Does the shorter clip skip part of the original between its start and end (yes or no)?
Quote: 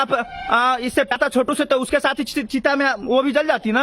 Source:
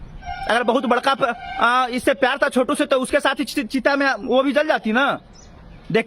yes